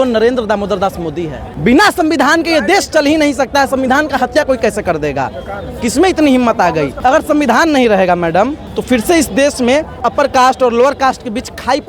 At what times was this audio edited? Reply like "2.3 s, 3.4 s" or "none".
1.4 s, 6.9 s, 8.7 s, 10.1 s